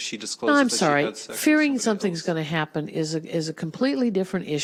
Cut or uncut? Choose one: uncut